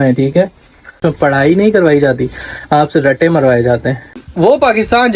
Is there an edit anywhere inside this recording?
yes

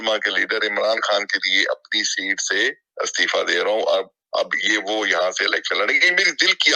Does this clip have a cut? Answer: no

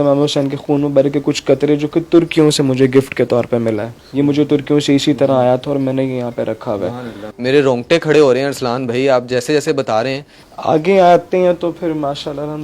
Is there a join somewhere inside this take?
no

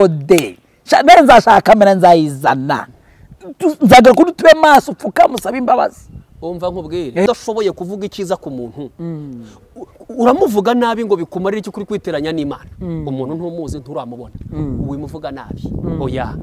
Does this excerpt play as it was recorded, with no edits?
no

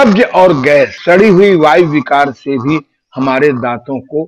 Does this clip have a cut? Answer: yes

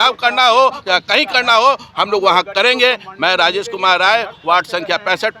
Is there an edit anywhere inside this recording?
no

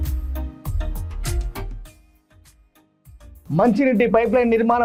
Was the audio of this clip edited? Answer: no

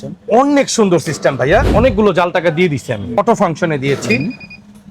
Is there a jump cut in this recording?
yes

